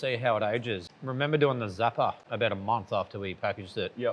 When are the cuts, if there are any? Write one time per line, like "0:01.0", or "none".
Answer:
0:00.8
0:02.2